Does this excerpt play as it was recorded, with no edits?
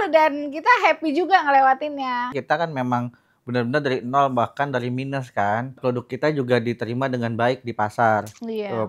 no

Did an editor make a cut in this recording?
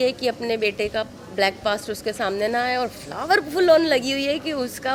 no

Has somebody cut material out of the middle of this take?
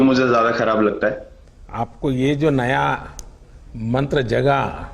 yes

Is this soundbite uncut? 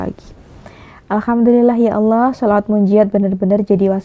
yes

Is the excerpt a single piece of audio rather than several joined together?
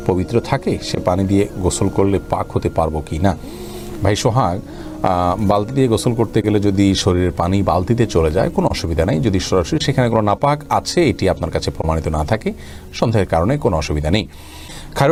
yes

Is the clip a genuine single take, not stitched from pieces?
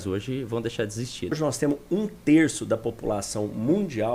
no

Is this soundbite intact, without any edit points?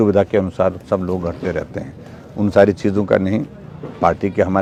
yes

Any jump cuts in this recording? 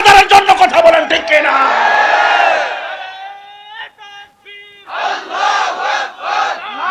no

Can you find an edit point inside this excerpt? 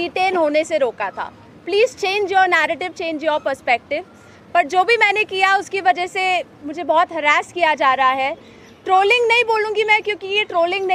no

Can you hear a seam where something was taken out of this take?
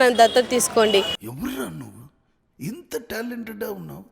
yes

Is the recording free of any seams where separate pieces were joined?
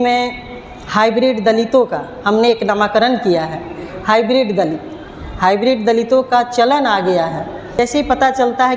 no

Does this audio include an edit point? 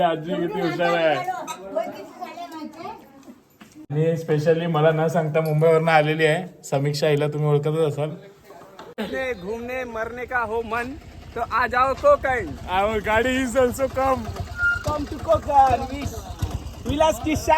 yes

